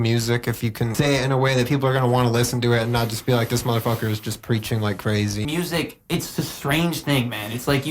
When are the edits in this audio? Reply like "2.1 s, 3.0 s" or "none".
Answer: 0.9 s, 5.4 s